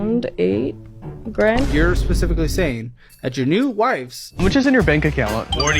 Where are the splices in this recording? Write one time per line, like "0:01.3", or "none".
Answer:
0:04.2